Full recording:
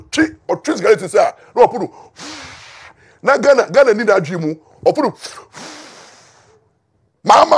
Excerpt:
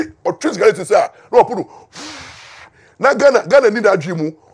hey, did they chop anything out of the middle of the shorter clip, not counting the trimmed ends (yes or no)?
no